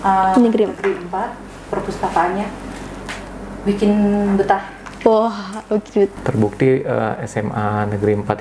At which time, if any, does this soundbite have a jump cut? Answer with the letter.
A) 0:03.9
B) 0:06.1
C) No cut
B